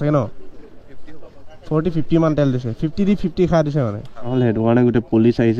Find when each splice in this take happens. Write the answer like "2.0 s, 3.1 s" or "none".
4.3 s